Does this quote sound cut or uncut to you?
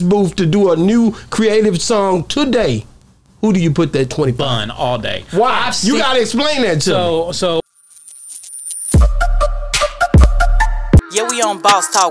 cut